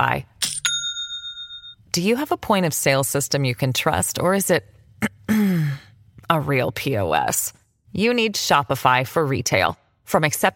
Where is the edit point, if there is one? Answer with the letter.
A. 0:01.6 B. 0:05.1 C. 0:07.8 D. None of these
D